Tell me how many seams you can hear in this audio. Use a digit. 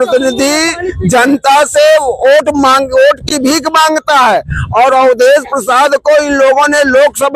0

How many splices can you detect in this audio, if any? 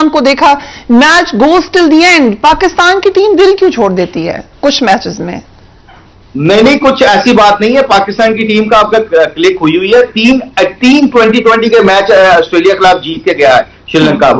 0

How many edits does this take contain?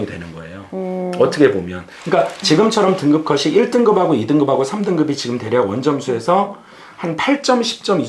0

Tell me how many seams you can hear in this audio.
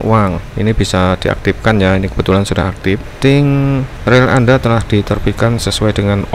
2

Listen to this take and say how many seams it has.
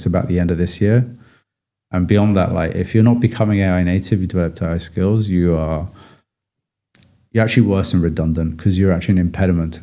0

